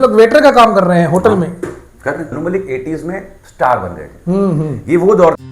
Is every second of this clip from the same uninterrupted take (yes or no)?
no